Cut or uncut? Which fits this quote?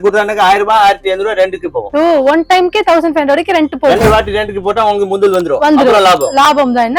uncut